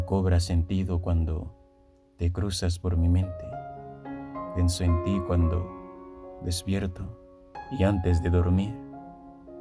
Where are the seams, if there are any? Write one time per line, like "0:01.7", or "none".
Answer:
0:08.7